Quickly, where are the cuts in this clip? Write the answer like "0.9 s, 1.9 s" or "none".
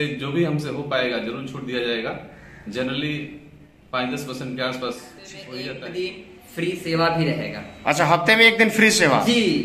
5.6 s